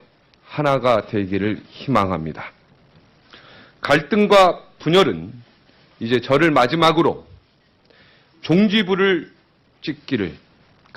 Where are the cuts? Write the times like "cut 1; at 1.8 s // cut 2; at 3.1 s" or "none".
none

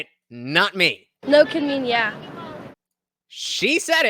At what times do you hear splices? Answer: cut 1; at 2.7 s

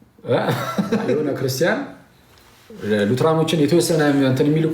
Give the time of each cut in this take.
cut 1; at 1.2 s

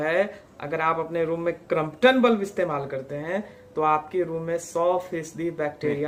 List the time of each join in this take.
none

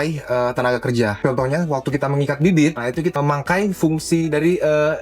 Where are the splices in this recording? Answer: cut 1; at 1.2 s // cut 2; at 2.8 s

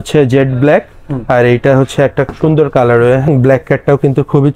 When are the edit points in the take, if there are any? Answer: cut 1; at 3.3 s

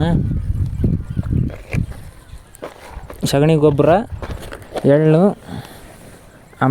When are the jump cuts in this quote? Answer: none

